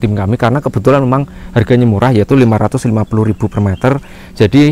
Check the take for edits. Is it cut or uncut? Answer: uncut